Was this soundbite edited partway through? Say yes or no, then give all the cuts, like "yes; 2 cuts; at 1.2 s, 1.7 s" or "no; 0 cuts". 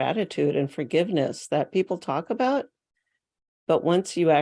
no; 0 cuts